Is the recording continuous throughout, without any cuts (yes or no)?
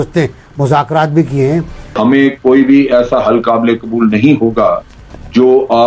no